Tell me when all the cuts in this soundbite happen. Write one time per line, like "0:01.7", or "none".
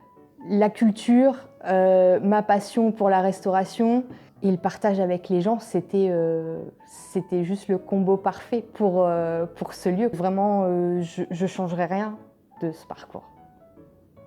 0:04.2
0:10.2